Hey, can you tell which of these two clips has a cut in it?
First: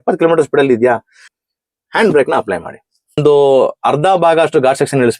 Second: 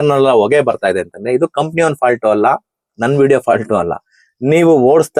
first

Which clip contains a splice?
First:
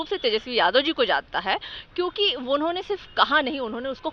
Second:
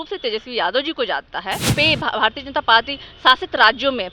second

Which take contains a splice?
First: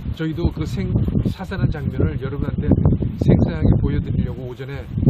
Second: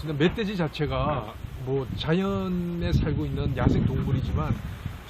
second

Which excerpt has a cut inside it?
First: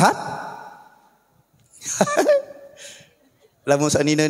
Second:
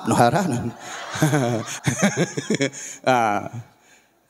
second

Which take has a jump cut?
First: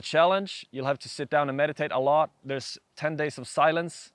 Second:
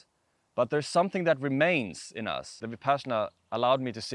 second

